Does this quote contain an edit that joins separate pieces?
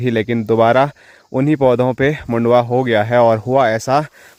no; 0 cuts

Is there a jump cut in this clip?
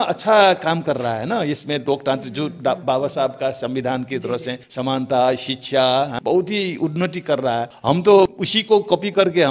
yes; 4 cuts; at 4.6 s, 6.1 s, 7.7 s, 8.5 s

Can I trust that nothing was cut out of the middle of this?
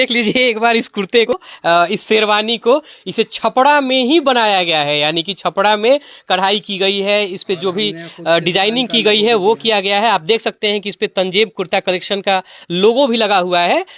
no; 1 cut; at 1.3 s

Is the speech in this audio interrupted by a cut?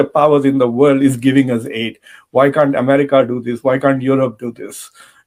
no; 0 cuts

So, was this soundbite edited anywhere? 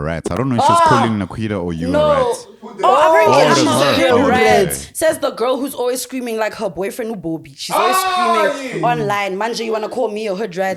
no; 0 cuts

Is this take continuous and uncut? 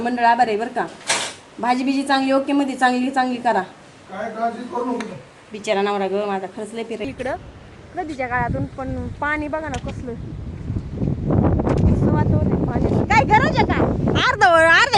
no; 1 cut; at 7.0 s

